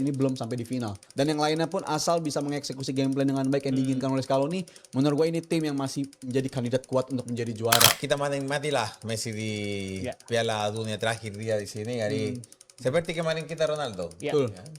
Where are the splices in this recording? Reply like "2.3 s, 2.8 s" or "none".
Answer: 1.0 s, 8.0 s